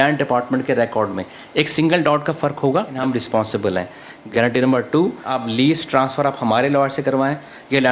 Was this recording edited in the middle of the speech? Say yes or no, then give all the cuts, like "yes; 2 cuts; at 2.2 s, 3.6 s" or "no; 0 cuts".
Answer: yes; 3 cuts; at 3.0 s, 4.2 s, 5.3 s